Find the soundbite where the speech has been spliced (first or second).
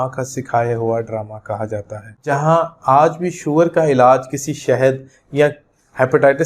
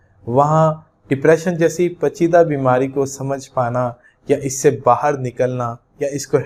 first